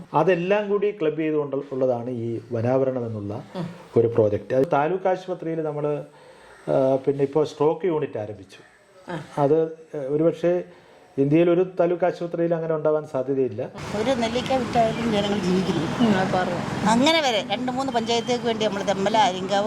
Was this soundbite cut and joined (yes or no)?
yes